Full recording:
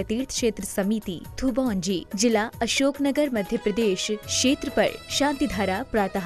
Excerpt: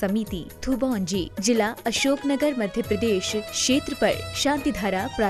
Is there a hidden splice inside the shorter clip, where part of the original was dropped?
no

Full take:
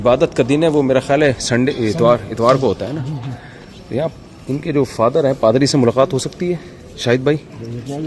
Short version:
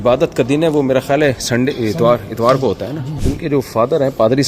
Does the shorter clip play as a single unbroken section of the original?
no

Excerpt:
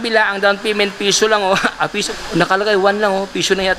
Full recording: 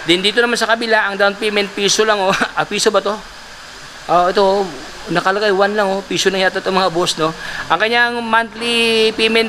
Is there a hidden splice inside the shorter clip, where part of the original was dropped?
yes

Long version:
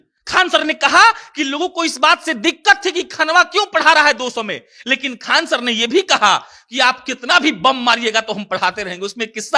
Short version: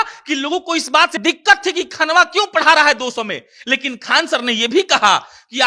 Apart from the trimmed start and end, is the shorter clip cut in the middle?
yes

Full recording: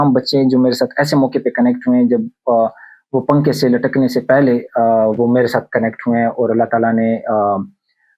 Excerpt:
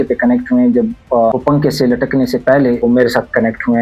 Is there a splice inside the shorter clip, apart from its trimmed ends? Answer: yes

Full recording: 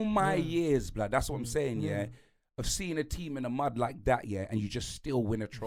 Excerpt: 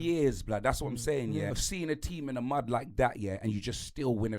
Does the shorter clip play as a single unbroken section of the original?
no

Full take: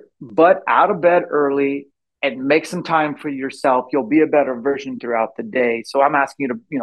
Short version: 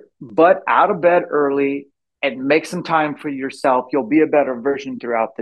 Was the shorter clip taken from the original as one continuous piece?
yes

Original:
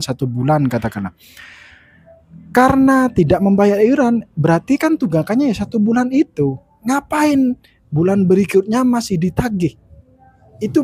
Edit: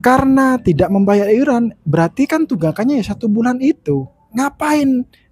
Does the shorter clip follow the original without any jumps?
yes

